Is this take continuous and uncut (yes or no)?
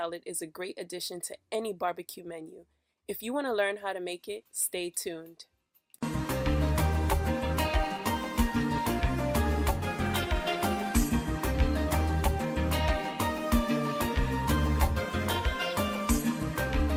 yes